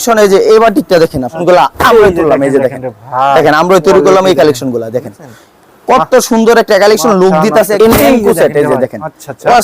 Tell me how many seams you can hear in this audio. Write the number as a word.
two